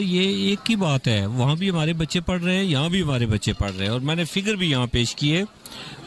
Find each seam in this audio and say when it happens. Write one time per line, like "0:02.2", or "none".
none